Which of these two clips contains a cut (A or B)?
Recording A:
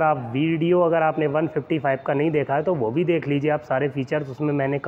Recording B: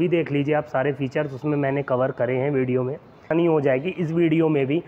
B